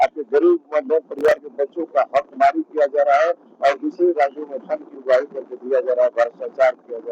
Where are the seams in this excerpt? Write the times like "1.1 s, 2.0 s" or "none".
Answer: none